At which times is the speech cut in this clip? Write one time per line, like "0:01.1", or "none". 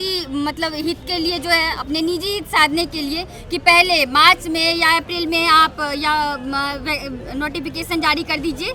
none